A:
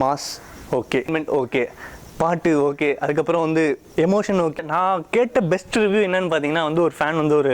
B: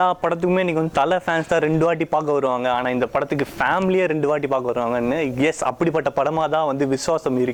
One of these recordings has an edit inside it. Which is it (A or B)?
A